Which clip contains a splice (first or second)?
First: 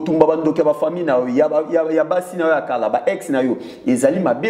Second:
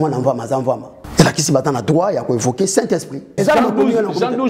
second